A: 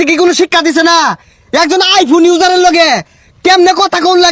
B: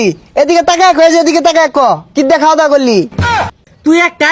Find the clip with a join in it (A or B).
B